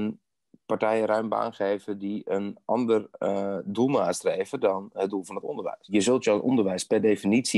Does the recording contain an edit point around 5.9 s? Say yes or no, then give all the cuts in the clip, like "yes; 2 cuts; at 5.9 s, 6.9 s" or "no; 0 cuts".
yes; 1 cut; at 5.9 s